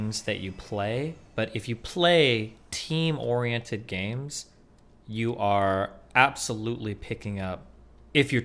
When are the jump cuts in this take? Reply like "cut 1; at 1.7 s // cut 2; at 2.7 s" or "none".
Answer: none